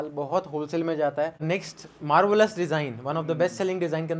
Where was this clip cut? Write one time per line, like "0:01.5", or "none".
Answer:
0:01.4